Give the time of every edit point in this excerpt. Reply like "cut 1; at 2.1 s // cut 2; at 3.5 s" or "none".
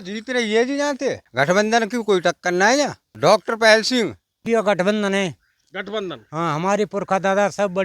cut 1; at 1.2 s // cut 2; at 2.6 s // cut 3; at 4.4 s